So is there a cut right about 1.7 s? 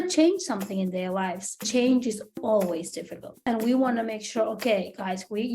yes; 2 cuts; at 1.7 s, 3.4 s

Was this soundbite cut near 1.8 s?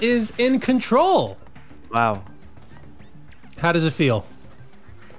no; 0 cuts

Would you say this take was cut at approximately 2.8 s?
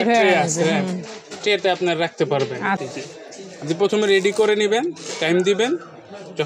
yes; 1 cut; at 2.8 s

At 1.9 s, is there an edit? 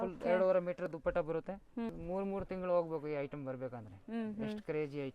yes; 1 cut; at 1.9 s

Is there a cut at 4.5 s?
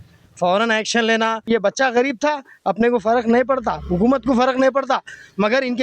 no; 1 cut; at 1.5 s

